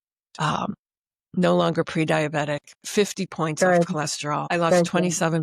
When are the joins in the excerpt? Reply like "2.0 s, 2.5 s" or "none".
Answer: 4.4 s